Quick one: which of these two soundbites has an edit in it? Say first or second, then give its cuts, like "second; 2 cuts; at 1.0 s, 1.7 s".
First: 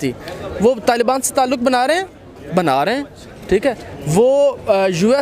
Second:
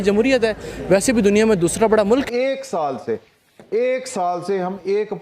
second; 1 cut; at 2.3 s